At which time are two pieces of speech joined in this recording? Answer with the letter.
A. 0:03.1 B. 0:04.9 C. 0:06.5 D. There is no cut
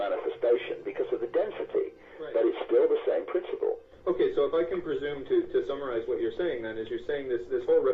A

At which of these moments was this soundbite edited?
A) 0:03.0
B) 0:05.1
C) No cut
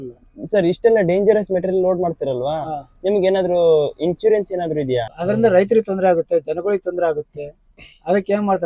B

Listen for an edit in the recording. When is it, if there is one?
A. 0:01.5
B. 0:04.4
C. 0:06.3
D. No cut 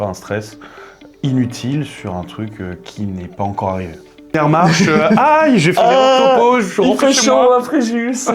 B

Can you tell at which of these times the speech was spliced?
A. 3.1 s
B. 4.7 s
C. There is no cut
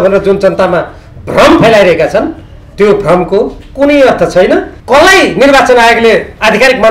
B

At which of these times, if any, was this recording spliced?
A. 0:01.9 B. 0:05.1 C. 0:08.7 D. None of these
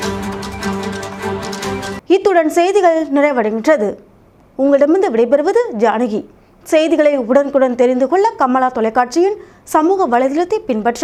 D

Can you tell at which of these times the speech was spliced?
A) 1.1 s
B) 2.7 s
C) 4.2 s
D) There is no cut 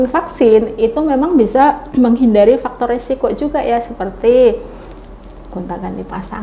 D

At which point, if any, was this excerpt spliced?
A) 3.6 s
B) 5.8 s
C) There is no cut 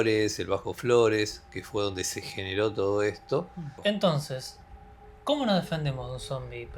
A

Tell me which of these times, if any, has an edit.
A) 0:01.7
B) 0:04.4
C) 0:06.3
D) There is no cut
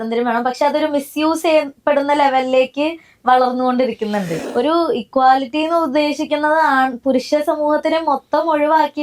B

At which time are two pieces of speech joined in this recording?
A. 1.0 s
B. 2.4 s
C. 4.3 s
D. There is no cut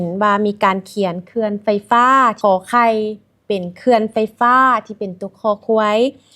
B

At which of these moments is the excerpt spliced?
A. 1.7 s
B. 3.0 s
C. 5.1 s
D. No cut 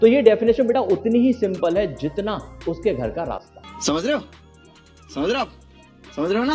D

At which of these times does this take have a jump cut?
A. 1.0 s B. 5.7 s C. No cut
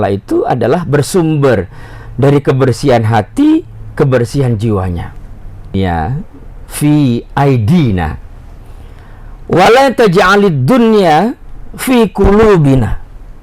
B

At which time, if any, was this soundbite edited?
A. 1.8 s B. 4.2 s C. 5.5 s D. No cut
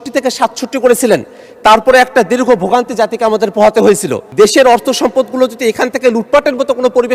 B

